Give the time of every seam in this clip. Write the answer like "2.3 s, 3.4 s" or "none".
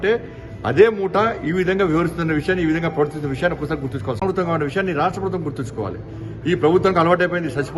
4.2 s